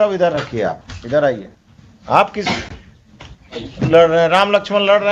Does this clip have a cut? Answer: no; 0 cuts

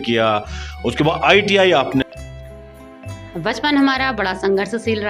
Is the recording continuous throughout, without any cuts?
no; 1 cut; at 2.0 s

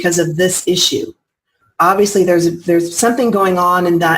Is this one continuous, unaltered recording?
no; 1 cut; at 1.6 s

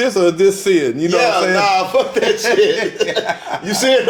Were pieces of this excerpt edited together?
no; 0 cuts

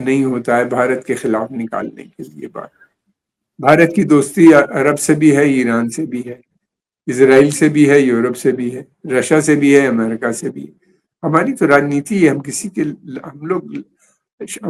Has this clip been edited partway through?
no; 0 cuts

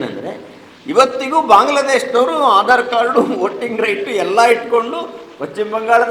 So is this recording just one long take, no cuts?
yes; 0 cuts

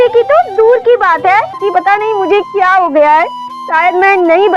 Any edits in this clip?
yes; 1 cut; at 1.6 s

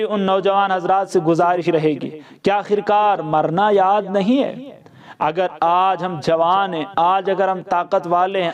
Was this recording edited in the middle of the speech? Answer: no; 0 cuts

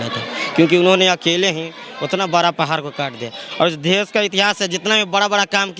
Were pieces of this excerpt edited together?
no; 0 cuts

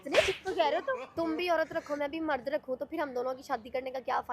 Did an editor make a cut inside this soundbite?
yes; 1 cut; at 1.1 s

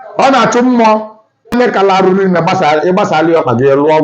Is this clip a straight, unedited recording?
no; 1 cut; at 1.5 s

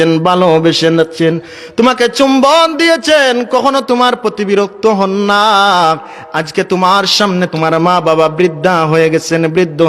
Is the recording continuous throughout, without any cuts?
no; 1 cut; at 7.5 s

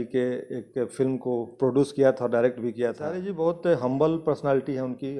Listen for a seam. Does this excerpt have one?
yes; 1 cut; at 3.2 s

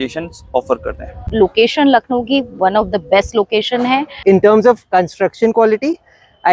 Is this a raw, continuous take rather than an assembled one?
no; 2 cuts; at 1.3 s, 4.2 s

